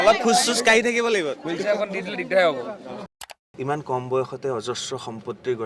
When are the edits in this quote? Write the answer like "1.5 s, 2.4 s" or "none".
3.3 s